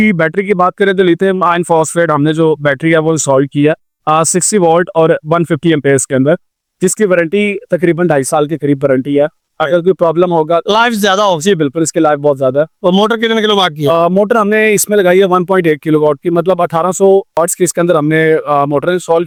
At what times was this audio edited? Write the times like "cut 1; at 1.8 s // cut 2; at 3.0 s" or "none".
none